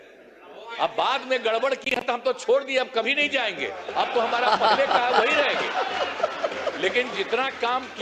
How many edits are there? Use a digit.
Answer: 0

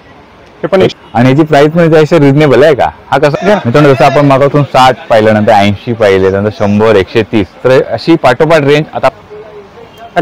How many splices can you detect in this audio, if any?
3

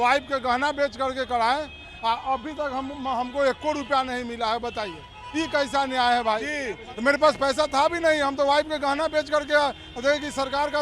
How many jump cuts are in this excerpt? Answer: 1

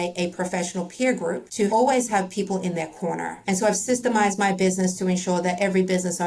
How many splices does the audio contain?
2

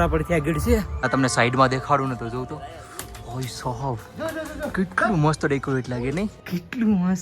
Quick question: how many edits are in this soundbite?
2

